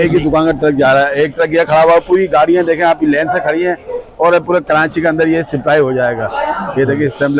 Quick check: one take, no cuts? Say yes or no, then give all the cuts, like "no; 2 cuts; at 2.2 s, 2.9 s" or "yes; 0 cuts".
yes; 0 cuts